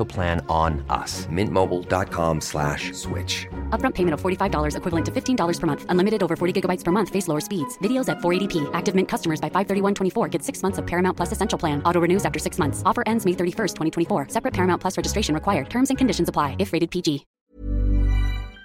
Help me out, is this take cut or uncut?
cut